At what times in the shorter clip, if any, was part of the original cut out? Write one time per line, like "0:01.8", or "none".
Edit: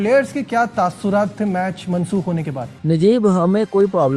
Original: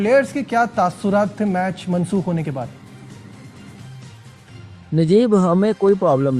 0:02.7